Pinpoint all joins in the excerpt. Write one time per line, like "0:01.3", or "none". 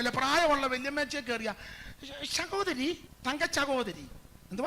0:03.1